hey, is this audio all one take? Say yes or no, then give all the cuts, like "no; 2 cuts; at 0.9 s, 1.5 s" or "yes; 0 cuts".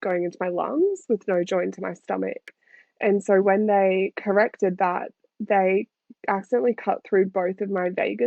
yes; 0 cuts